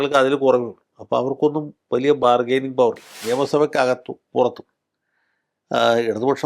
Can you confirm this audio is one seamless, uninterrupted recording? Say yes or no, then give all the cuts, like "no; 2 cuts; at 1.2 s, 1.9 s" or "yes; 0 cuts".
no; 1 cut; at 3.1 s